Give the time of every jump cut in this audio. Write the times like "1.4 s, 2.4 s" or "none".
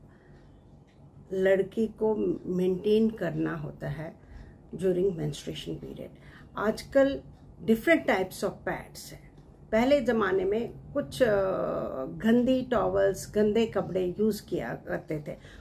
none